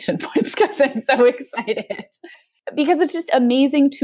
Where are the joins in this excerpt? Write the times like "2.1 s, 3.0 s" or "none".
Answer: 2.4 s